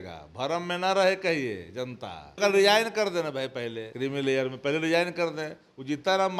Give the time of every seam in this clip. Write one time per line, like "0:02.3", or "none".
0:02.3
0:03.8

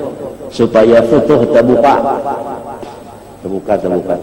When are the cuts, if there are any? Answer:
none

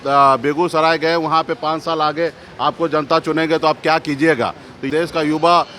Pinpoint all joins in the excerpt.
0:04.9

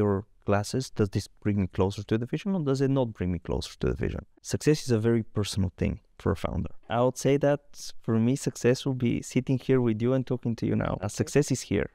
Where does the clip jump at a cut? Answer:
0:04.2
0:06.8
0:11.1

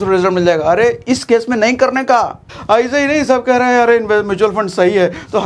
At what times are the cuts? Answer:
0:02.5

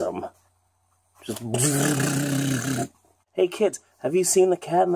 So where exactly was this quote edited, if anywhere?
0:03.2

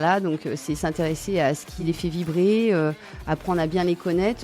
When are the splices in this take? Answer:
0:01.7

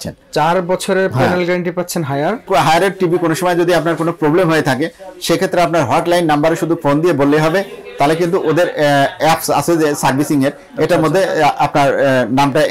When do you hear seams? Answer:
0:02.5

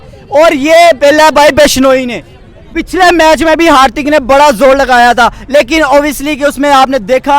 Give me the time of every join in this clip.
0:02.7

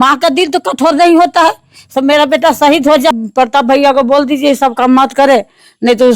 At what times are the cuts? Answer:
0:03.1

